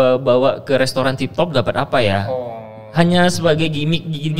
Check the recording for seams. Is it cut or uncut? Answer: uncut